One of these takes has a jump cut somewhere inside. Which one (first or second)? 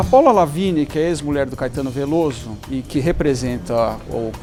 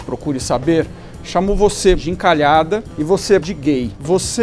second